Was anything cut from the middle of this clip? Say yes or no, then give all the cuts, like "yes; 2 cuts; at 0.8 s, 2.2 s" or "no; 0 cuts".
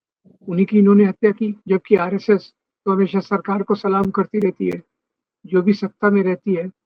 yes; 1 cut; at 1.6 s